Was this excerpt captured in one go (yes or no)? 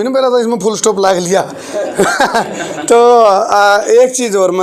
yes